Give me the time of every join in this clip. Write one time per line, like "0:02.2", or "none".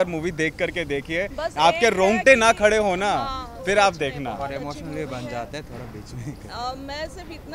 none